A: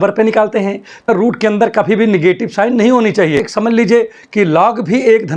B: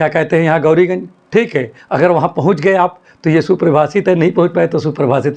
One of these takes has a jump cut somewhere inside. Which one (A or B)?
A